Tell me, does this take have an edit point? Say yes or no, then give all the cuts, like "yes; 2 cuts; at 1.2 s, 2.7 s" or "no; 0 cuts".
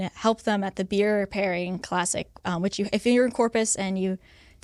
no; 0 cuts